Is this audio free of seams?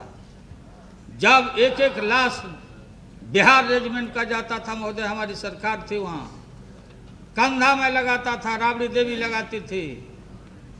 yes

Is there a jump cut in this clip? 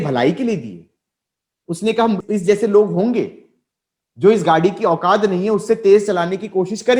yes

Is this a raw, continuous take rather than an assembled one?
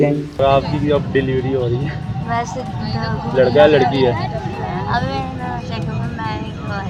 yes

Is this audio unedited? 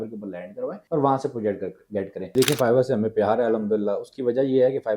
no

